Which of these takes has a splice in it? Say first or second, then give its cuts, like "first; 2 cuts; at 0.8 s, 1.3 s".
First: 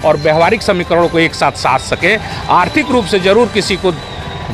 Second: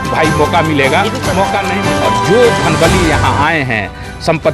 second; 1 cut; at 1.8 s